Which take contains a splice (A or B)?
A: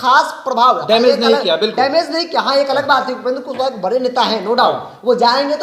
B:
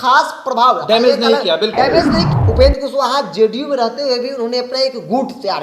B